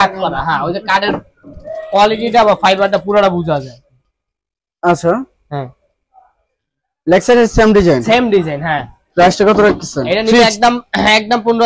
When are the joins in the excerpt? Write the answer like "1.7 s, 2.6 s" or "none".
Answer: none